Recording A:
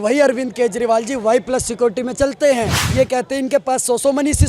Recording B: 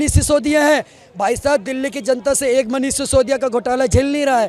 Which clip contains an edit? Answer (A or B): A